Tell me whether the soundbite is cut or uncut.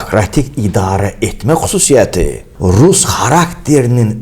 cut